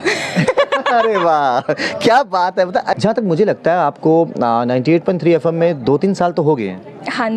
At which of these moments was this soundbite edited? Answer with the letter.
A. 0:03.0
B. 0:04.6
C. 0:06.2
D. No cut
A